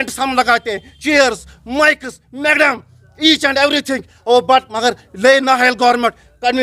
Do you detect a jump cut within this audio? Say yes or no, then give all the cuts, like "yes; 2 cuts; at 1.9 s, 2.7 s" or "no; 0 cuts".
no; 0 cuts